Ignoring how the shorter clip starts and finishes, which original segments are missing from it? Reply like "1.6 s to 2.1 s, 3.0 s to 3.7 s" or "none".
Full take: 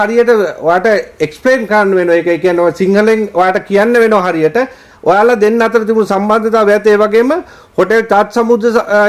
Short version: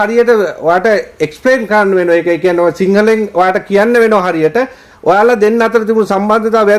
none